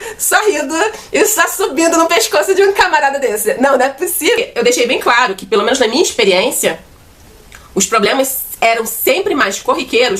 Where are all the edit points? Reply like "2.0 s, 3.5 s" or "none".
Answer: 4.4 s